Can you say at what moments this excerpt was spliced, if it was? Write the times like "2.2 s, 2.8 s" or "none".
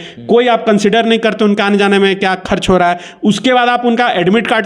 none